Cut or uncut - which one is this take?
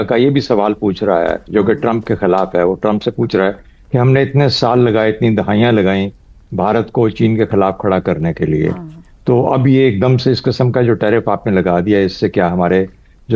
uncut